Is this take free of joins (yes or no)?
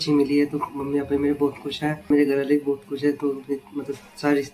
no